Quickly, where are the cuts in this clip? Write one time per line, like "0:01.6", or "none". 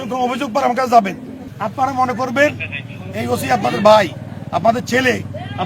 0:01.5